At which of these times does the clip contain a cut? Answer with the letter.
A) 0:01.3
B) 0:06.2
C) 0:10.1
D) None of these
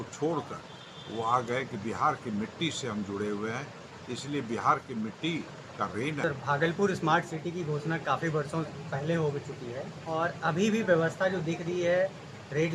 B